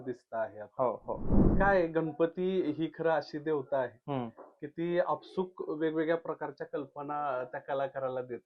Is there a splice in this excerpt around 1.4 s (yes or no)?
yes